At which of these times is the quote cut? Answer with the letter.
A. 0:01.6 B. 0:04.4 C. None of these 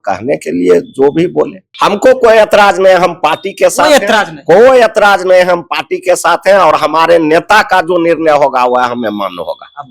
A